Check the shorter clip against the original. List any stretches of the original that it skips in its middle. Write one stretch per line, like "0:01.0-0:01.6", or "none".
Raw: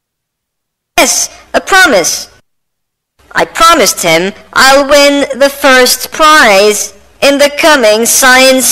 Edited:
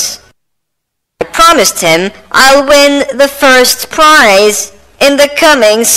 0:03.3-0:03.4